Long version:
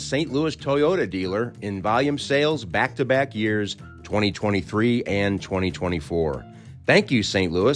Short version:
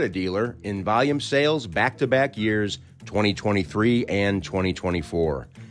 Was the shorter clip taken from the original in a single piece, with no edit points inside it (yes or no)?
yes